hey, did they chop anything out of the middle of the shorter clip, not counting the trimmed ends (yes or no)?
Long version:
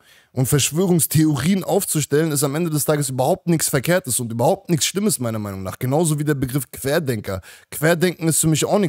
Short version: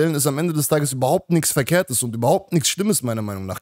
no